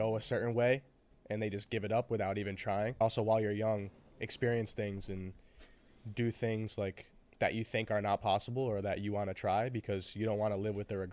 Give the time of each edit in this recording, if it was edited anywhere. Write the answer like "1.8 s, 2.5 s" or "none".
3.0 s